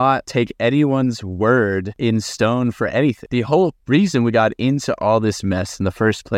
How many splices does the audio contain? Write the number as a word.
two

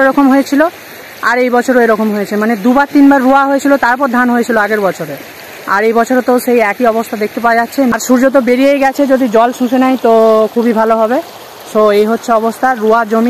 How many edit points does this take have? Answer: one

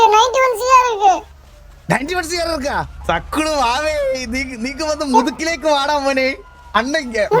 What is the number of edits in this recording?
one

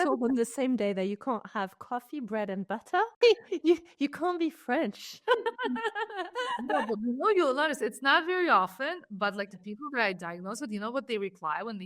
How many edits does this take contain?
one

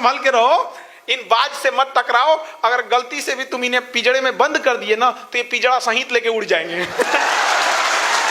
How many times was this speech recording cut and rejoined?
zero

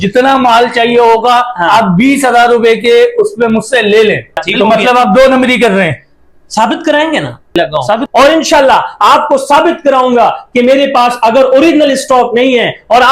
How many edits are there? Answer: two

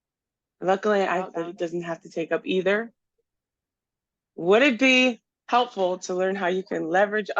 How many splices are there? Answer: one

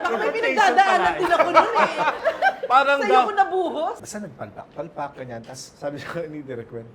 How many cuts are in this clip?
two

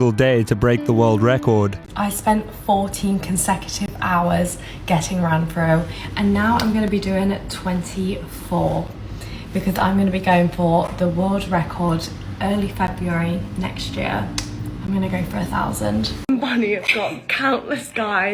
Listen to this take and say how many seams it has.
one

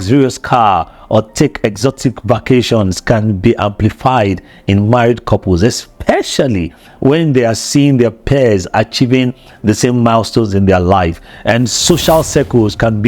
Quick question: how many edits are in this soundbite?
zero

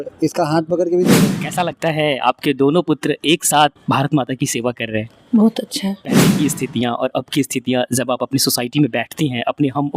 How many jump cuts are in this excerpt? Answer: two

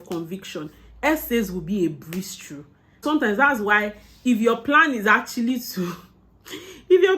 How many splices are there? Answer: one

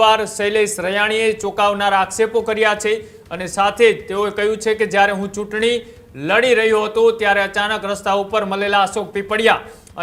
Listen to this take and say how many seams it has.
zero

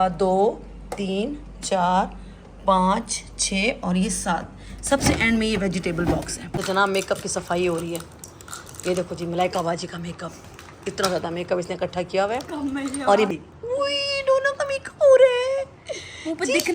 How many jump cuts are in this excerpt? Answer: two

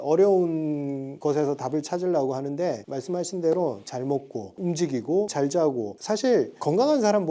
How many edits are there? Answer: one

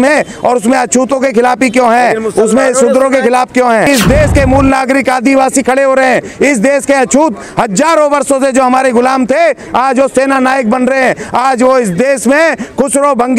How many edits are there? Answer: one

